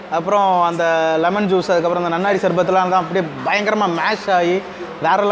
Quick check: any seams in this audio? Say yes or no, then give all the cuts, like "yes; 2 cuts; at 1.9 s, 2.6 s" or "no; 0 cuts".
no; 0 cuts